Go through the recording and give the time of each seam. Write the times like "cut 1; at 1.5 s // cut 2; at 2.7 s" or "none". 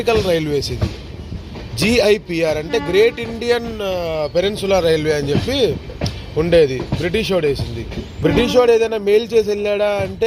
cut 1; at 8.0 s